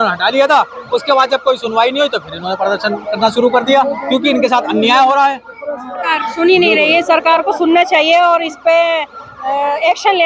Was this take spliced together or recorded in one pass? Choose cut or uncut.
cut